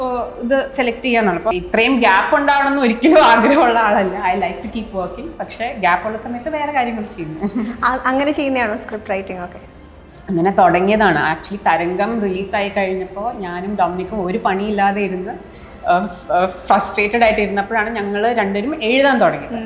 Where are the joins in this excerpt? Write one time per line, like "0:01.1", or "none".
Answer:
0:01.5